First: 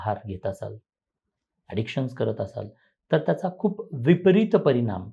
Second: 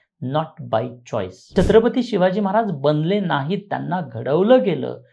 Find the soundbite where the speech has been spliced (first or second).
second